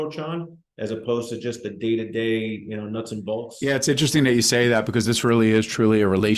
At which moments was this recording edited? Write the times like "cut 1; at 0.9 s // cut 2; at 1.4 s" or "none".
cut 1; at 3.5 s